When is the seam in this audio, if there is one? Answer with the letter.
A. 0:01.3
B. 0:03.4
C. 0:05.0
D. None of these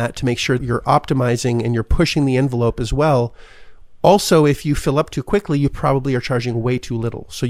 D